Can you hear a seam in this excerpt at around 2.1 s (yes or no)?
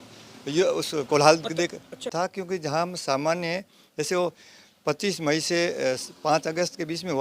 yes